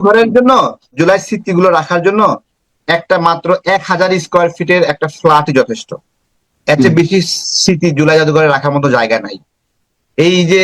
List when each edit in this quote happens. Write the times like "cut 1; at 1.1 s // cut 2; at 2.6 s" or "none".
cut 1; at 1.0 s